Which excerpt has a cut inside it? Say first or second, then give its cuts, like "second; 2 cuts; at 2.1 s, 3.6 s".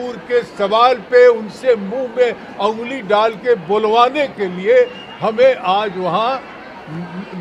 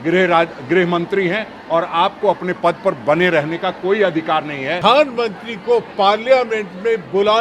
second; 1 cut; at 4.8 s